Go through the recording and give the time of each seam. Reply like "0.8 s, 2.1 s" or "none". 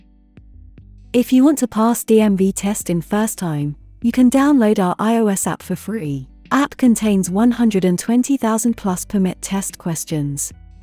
1.1 s